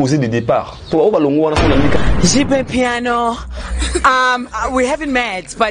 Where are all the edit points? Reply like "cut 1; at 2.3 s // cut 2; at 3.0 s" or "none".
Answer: cut 1; at 2.1 s